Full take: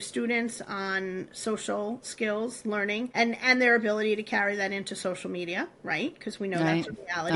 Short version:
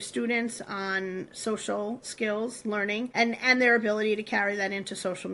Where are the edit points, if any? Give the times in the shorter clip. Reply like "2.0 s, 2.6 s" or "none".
none